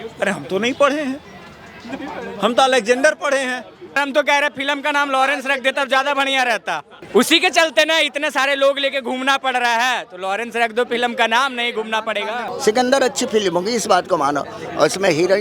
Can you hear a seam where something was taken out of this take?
yes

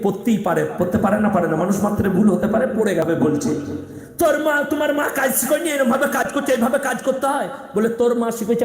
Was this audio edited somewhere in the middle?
yes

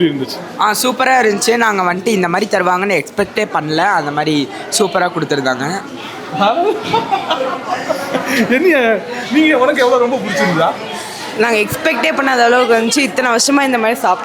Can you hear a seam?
no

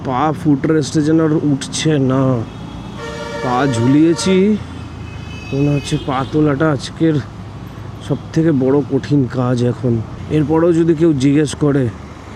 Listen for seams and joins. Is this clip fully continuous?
yes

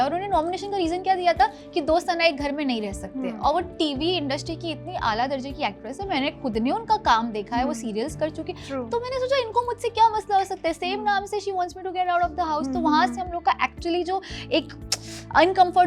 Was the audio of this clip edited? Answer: no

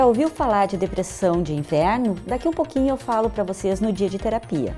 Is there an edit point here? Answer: no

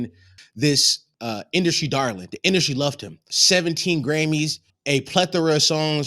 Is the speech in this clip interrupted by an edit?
yes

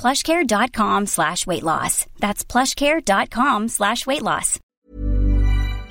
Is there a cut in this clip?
yes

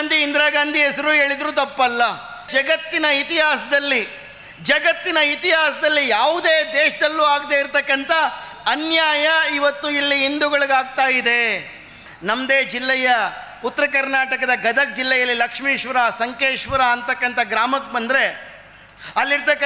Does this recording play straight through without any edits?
no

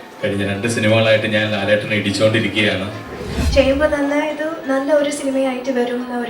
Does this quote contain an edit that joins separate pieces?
yes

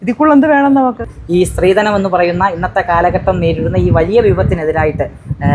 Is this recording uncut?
no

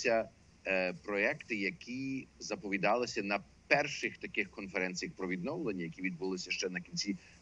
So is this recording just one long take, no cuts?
yes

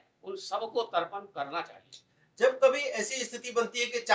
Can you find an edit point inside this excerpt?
no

